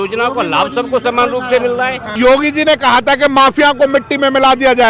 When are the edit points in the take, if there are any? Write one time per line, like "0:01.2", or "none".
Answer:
0:02.1